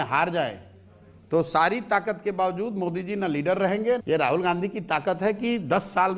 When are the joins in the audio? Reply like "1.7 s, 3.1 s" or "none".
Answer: 4.0 s